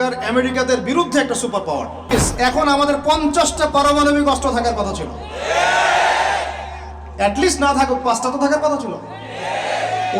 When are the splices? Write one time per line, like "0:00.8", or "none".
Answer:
0:02.1